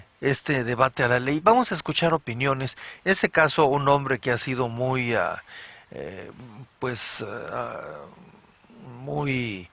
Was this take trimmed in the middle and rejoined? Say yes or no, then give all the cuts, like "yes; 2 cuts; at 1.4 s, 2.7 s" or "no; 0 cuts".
yes; 1 cut; at 7.8 s